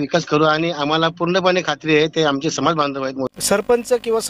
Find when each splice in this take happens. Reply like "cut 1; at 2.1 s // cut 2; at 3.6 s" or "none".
cut 1; at 3.3 s